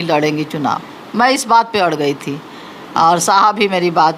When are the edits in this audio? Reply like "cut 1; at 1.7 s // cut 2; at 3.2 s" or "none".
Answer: none